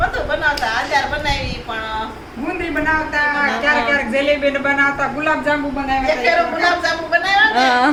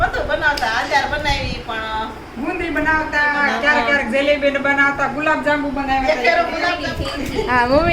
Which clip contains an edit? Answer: second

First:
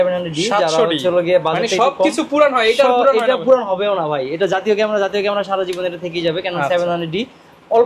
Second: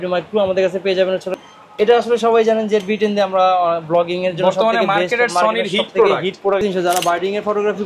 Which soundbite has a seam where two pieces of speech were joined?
second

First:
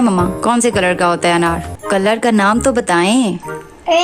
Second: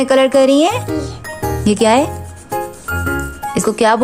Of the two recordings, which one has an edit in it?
first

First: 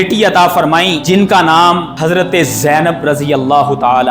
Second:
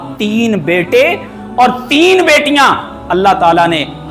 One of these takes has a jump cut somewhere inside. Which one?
first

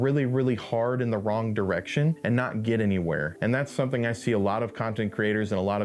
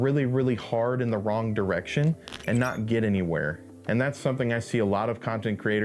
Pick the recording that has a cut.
first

